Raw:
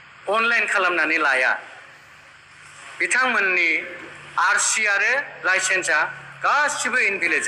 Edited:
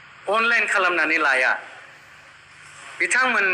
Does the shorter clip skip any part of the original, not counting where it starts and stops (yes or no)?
no